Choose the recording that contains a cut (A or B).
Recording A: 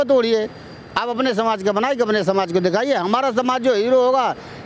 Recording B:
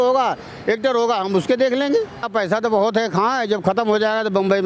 B